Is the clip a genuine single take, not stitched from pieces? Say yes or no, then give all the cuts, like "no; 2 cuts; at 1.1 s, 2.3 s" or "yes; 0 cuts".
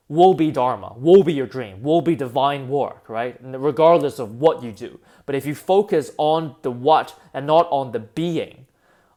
yes; 0 cuts